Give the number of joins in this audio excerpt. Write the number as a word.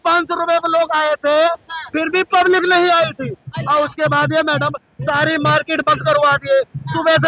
zero